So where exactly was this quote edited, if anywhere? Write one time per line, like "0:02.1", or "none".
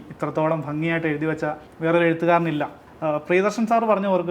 0:01.7
0:02.8